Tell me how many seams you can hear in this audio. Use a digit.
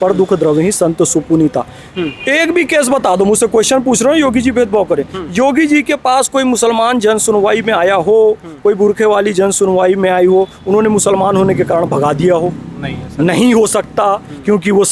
0